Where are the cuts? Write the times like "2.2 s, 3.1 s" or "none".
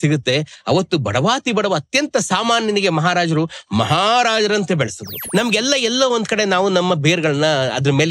5.2 s